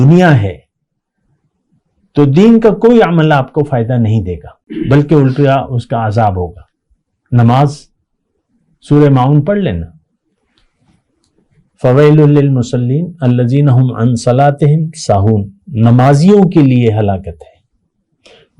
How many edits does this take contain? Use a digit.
1